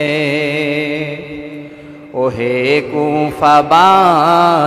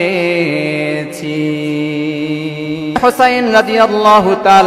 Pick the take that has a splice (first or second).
second